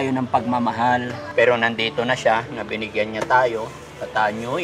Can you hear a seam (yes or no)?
yes